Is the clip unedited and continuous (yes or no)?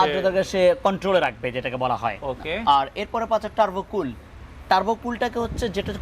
yes